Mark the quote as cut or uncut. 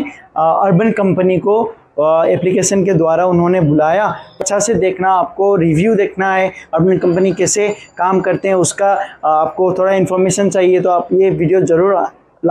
cut